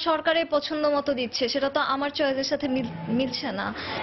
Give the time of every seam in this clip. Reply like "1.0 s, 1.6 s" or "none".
none